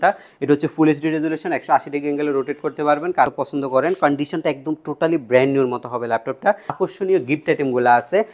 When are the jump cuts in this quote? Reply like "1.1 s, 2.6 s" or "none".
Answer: 3.3 s, 6.8 s